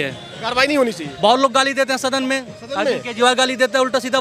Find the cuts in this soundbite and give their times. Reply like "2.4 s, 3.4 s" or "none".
none